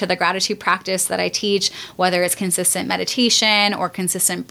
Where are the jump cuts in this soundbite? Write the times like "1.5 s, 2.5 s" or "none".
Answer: none

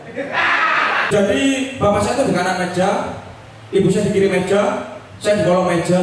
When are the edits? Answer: 1.0 s

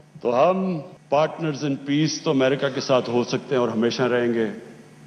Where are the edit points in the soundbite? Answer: 0.9 s

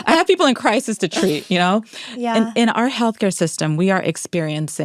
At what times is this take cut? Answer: none

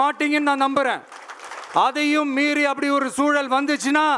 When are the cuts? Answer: none

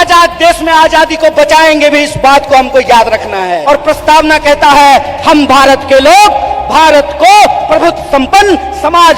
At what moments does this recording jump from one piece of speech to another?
3.6 s

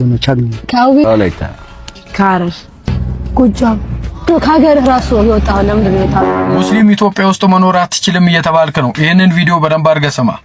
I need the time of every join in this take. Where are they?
6.6 s

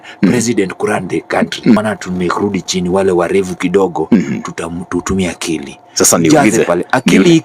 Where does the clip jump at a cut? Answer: 1.8 s

